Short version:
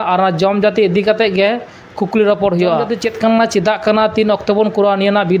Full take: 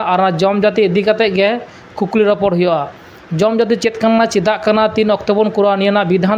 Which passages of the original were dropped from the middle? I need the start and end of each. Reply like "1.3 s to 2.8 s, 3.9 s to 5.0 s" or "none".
2.9 s to 3.7 s